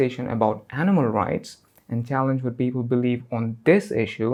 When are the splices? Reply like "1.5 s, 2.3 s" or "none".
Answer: none